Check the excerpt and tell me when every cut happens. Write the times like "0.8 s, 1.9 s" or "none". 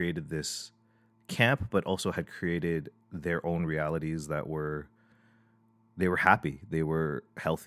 none